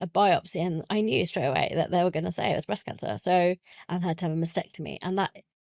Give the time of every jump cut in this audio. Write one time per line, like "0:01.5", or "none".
0:03.7